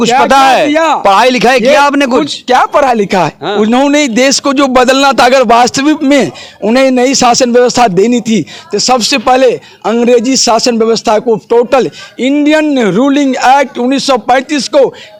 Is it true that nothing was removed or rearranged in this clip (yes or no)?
yes